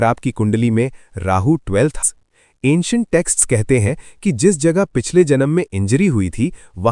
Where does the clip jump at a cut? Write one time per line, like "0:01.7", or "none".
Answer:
0:02.0